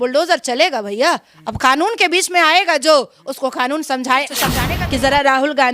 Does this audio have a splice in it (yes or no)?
yes